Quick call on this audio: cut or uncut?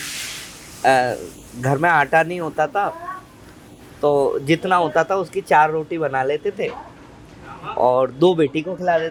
uncut